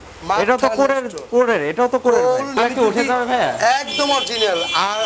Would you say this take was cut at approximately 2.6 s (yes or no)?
yes